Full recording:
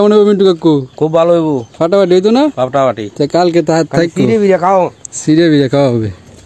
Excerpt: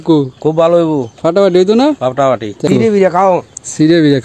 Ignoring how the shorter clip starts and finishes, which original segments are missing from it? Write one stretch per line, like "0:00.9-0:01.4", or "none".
0:03.2-0:04.1

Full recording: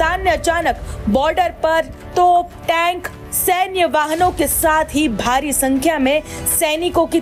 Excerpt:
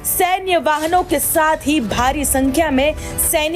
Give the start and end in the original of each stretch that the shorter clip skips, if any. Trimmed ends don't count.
none

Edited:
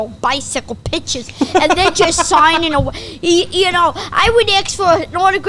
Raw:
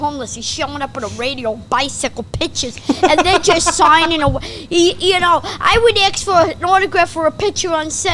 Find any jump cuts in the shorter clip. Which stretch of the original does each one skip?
none

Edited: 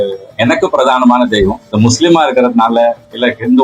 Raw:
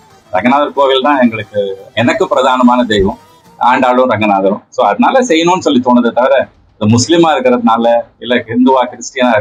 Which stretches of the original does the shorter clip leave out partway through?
0:03.2-0:06.7

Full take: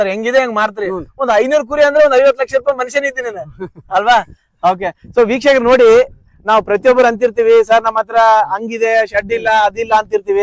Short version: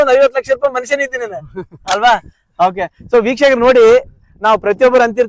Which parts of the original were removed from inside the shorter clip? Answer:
none

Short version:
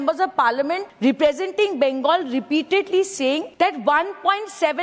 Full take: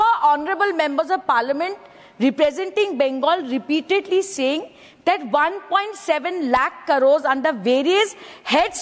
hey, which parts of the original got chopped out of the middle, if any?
0:01.8-0:02.1
0:04.7-0:04.9

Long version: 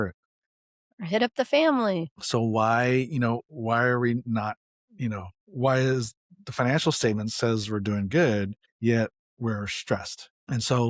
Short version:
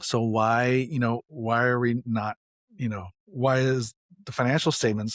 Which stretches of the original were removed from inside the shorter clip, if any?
none

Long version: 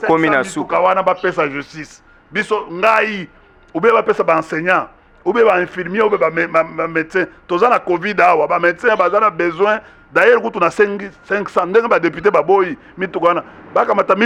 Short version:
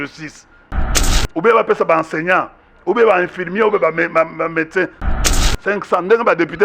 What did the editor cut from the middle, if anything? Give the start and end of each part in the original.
0:02.3-0:03.1
0:07.6-0:10.9

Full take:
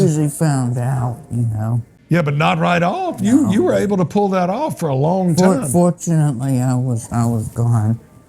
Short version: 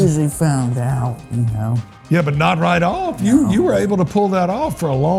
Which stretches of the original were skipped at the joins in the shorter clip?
none

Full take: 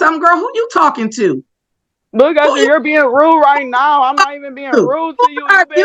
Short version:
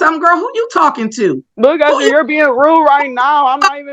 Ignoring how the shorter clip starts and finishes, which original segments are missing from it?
0:01.5-0:02.0

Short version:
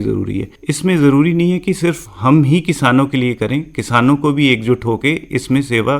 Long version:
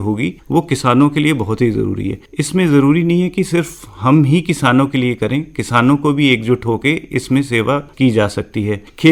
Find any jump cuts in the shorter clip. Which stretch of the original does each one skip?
0:03.8-0:03.9

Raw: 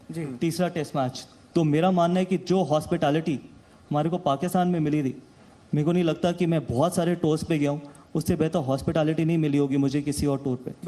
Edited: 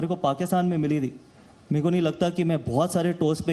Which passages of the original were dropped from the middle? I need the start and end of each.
none

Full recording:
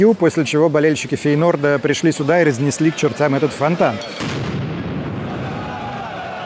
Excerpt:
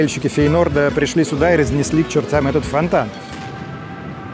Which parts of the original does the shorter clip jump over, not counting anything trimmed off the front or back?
none

